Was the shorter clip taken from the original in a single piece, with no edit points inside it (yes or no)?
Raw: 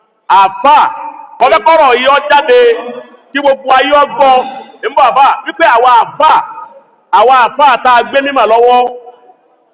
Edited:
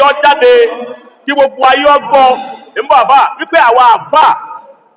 yes